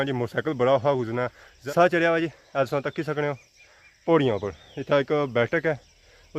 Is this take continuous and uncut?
yes; 0 cuts

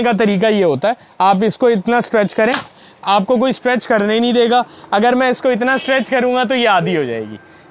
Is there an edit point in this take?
no; 0 cuts

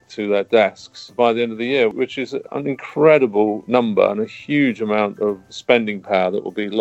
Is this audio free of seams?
no; 1 cut; at 2.3 s

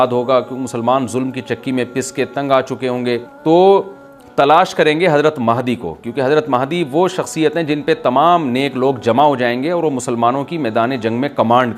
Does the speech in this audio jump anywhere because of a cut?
yes; 1 cut; at 3.3 s

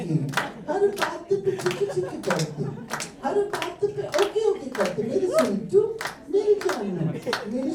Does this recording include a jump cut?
no; 0 cuts

